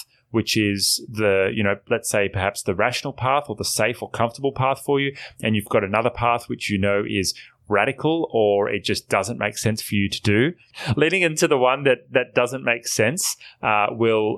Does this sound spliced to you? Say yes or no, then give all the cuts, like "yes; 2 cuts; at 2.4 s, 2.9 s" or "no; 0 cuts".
yes; 1 cut; at 10.7 s